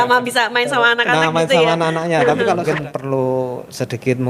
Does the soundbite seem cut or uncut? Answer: cut